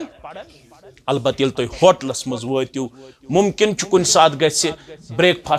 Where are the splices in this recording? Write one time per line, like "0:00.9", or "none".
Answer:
none